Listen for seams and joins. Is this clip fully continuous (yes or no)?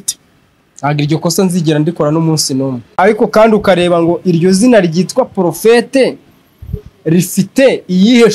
no